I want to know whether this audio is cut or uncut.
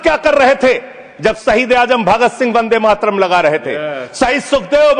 uncut